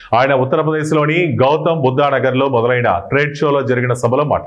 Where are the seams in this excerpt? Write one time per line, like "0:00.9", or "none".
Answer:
none